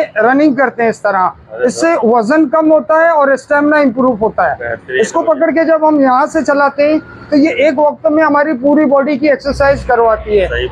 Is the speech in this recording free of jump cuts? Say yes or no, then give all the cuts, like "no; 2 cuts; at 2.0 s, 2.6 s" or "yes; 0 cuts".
yes; 0 cuts